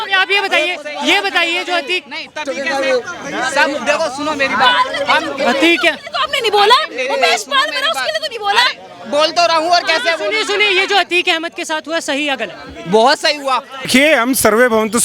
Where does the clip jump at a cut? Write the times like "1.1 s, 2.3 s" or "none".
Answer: 13.9 s